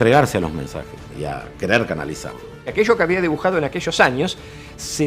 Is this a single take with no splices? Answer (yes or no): no